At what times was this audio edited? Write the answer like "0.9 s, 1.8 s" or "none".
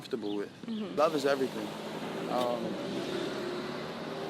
0.9 s